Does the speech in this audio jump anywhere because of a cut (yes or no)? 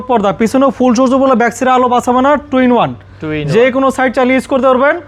no